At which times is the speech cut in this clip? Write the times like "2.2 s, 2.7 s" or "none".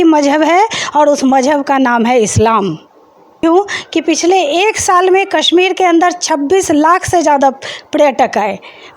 3.4 s